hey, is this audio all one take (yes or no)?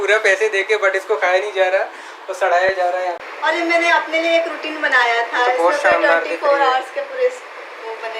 no